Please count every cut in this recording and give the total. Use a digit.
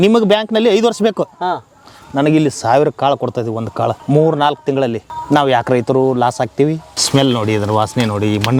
3